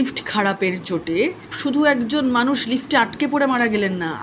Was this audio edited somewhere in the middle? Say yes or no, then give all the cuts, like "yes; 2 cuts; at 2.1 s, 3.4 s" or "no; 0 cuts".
yes; 1 cut; at 1.5 s